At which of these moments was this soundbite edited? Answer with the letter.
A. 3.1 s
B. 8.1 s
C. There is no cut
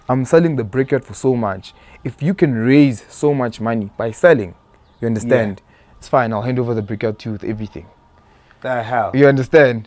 C